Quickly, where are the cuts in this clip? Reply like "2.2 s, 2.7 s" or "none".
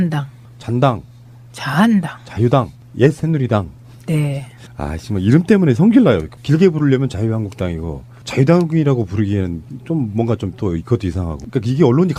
none